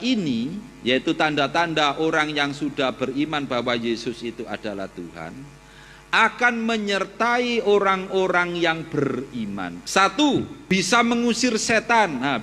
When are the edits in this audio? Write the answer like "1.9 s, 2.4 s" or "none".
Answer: 9.8 s, 10.6 s